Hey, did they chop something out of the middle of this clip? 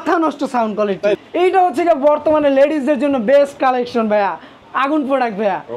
yes; 1 cut; at 1.2 s

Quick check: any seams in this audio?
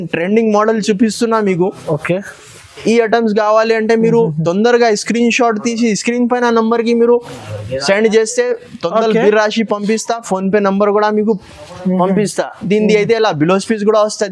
no; 0 cuts

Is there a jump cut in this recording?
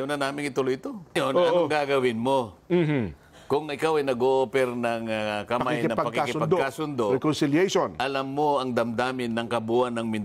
yes; 1 cut; at 1.2 s

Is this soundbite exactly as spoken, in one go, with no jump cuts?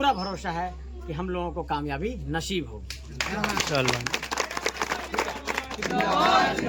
yes; 0 cuts

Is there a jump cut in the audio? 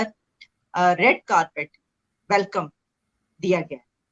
no; 0 cuts

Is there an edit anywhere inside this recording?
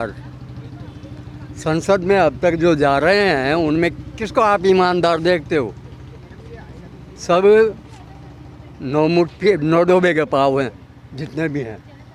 no; 0 cuts

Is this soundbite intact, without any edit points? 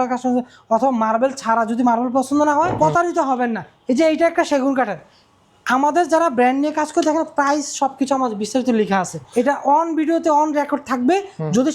no; 2 cuts; at 2.7 s, 9.2 s

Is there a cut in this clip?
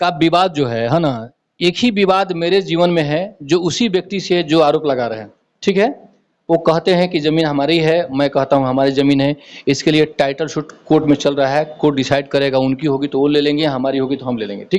no; 0 cuts

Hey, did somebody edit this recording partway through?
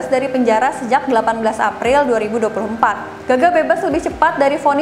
yes; 1 cut; at 3.1 s

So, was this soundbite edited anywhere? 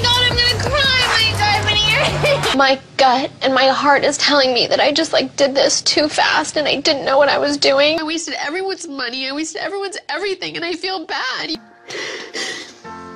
no; 0 cuts

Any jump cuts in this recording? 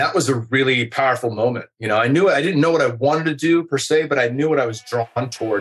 no; 0 cuts

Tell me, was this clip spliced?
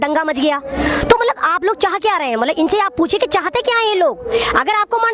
no; 0 cuts

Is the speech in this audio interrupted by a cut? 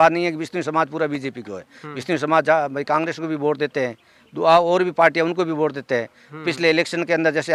no; 0 cuts

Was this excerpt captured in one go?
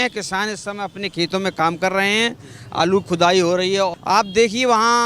no; 1 cut; at 4.0 s

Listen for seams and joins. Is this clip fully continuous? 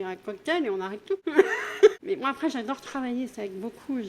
no; 2 cuts; at 1.2 s, 2.0 s

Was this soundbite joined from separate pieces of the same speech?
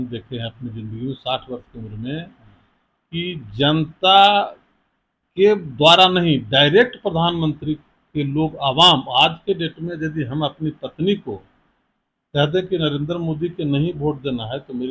no; 0 cuts

